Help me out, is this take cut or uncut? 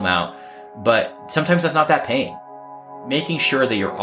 cut